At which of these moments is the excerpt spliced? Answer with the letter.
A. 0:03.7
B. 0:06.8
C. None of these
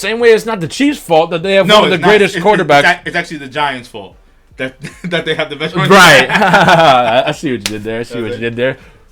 C